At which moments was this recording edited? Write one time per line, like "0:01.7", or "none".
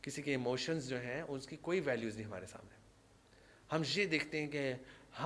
none